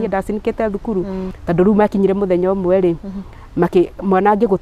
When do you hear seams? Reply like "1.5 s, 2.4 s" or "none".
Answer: 1.3 s